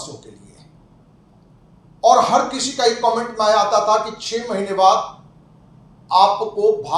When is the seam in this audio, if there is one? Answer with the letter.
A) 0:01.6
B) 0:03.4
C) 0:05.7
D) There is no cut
A